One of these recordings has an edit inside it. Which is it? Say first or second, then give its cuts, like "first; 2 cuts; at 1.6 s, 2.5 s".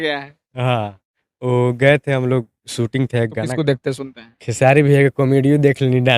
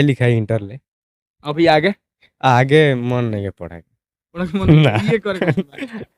first; 1 cut; at 3.4 s